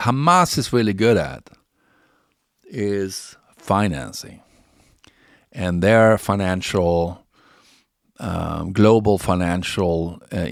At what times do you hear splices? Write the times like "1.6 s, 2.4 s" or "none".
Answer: none